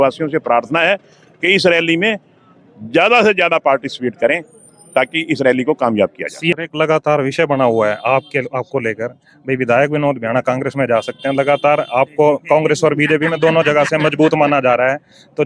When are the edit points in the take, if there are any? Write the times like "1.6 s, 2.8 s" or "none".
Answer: 6.5 s